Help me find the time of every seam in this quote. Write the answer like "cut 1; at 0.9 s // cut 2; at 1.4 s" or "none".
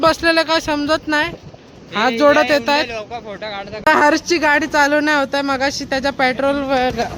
cut 1; at 3.9 s

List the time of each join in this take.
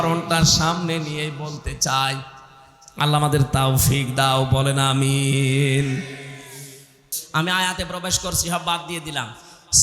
cut 1; at 7.2 s

